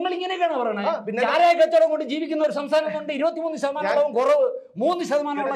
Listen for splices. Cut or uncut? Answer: uncut